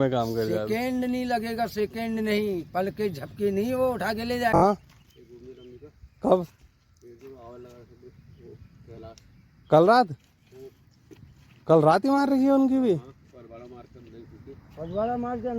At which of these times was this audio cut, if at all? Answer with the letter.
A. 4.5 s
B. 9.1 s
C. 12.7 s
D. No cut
A